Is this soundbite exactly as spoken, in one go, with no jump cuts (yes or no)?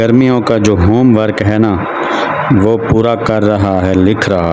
yes